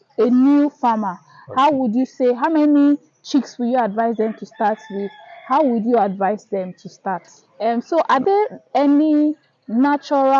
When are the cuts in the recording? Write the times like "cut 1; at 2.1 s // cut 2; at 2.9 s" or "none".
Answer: cut 1; at 7.4 s